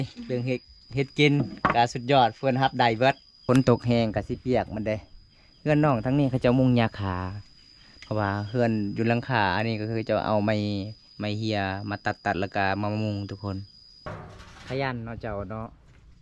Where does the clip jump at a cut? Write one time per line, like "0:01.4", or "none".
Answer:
0:03.3
0:14.1